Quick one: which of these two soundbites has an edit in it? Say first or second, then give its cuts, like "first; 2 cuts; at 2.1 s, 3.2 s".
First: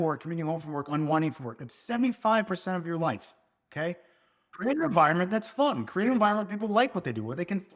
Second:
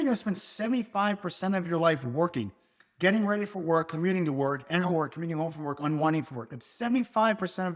first; 1 cut; at 4.6 s